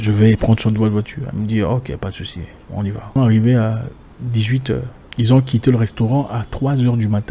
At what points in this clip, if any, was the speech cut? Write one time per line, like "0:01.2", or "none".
0:03.2
0:05.0